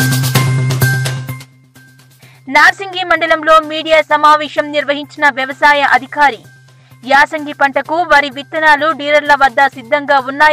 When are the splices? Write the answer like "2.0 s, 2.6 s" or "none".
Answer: none